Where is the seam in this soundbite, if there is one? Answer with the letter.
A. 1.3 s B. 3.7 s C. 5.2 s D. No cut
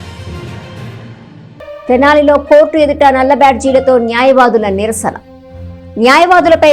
A